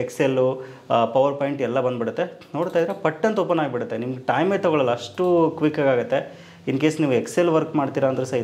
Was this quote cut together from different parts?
no; 0 cuts

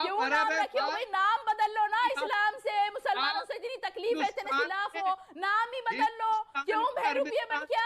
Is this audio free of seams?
yes; 0 cuts

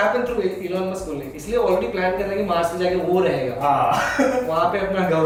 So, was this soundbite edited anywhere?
no; 0 cuts

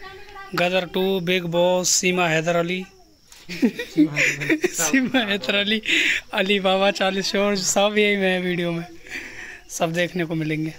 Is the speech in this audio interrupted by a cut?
no; 0 cuts

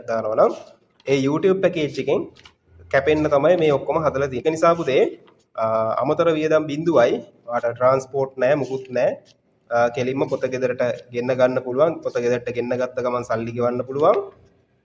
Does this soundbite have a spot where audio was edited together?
yes; 1 cut; at 4.4 s

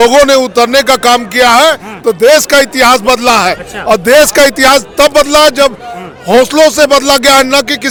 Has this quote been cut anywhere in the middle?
no; 0 cuts

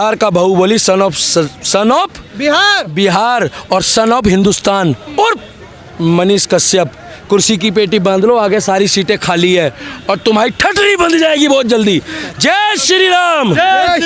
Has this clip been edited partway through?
no; 0 cuts

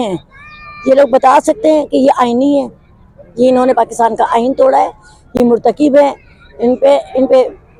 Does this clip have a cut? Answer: no; 0 cuts

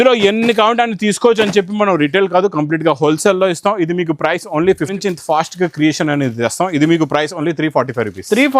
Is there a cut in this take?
yes; 1 cut; at 5.0 s

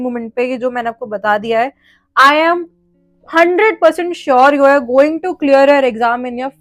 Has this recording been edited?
no; 0 cuts

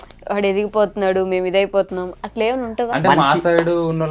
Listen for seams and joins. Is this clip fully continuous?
no; 1 cut; at 2.9 s

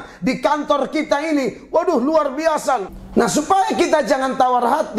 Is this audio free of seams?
no; 1 cut; at 2.9 s

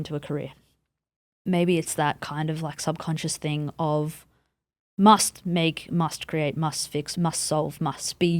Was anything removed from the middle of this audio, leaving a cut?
yes; 1 cut; at 7.1 s

